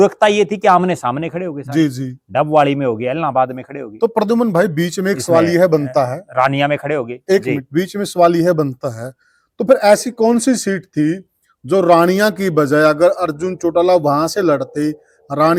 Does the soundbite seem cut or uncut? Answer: uncut